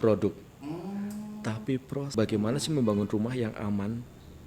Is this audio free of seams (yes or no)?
no